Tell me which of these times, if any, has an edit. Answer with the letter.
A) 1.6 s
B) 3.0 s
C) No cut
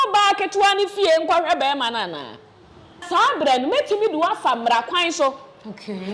B